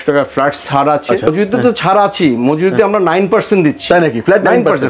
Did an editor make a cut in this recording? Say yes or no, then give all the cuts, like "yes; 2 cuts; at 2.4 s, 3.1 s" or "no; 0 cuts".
yes; 1 cut; at 1.3 s